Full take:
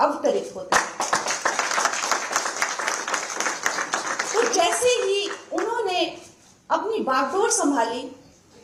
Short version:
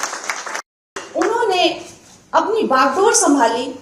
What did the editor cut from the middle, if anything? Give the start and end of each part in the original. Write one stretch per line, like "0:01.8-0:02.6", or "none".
0:03.3-0:05.4